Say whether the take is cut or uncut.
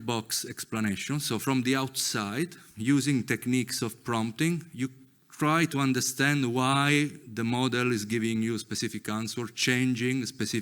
uncut